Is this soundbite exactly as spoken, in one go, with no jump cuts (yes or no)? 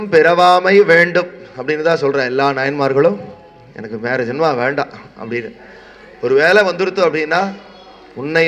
yes